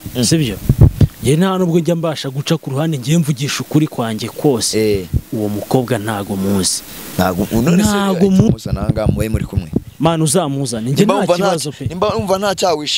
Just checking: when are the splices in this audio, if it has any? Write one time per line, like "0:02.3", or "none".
0:08.5

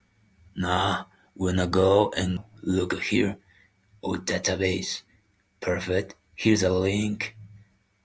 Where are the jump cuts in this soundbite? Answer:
0:02.4

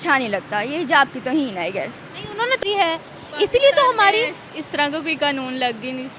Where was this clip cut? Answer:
0:02.6

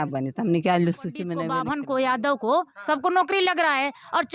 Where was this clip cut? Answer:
0:01.4

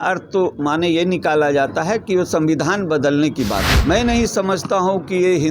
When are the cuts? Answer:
0:03.7

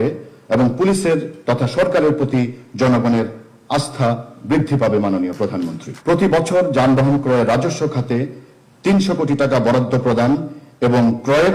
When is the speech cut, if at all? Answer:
0:05.8

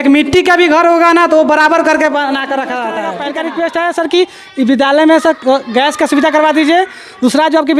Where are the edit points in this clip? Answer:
0:03.1

